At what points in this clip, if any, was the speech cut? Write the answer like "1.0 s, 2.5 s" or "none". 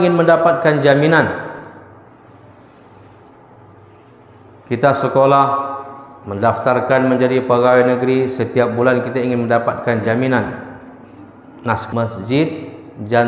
11.8 s